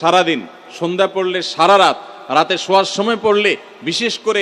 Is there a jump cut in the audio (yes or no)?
no